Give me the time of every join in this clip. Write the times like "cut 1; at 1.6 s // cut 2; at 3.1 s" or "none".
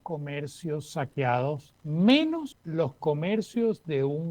cut 1; at 1.7 s // cut 2; at 2.6 s